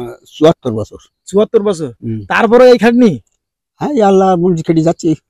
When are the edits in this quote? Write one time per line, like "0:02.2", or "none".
none